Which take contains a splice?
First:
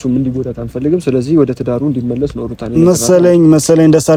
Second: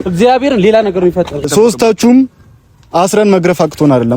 second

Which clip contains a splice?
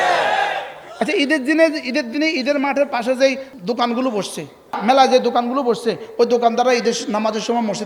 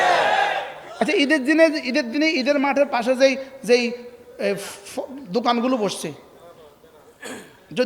first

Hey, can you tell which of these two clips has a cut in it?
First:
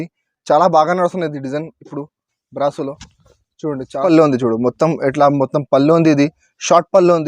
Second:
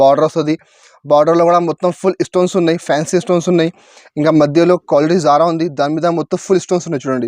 first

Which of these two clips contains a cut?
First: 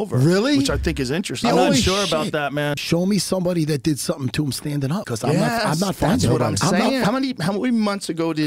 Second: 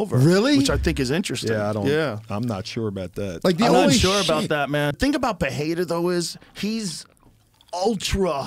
first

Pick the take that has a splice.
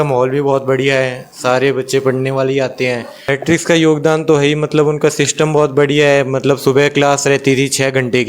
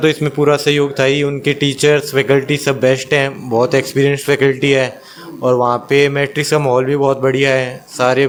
first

